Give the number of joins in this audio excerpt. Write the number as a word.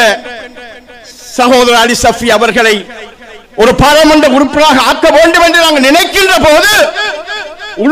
zero